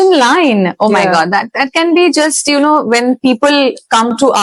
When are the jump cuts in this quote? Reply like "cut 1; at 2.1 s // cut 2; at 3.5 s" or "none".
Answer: none